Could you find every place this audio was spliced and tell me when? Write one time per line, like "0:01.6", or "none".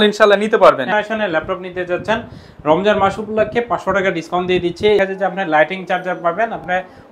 0:00.9
0:05.0